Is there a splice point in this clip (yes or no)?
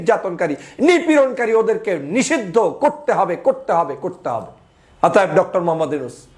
no